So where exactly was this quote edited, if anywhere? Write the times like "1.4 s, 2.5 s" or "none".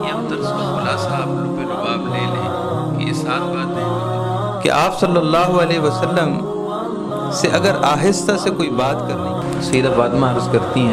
none